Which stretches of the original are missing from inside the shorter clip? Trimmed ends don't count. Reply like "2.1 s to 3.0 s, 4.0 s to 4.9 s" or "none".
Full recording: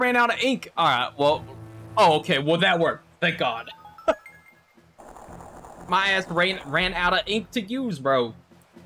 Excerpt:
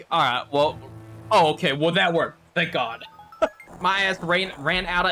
4.3 s to 5.7 s